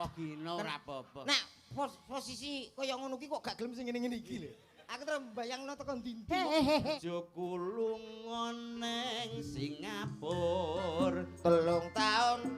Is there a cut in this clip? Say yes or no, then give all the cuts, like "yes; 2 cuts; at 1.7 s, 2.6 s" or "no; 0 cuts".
yes; 1 cut; at 7.0 s